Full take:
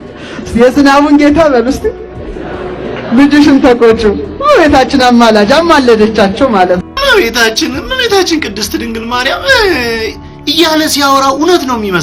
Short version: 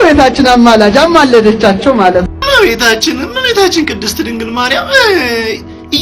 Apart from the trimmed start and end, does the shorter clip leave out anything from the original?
no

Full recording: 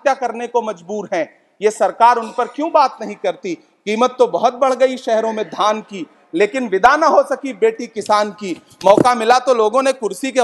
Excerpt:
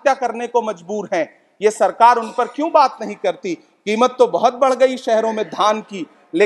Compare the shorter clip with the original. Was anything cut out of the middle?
no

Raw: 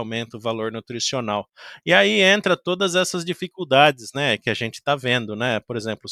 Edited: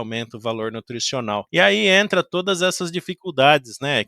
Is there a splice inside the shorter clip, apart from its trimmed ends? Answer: yes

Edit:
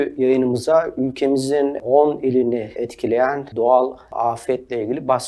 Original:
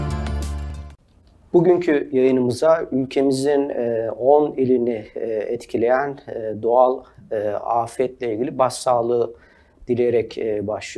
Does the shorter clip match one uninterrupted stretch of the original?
no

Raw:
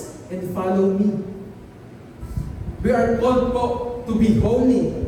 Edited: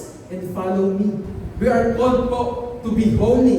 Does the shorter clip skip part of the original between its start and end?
yes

